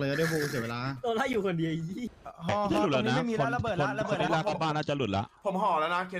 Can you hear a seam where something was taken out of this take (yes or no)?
yes